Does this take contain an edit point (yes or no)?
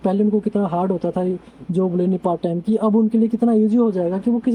no